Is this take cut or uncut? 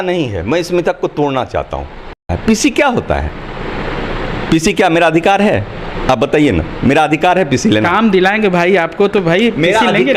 cut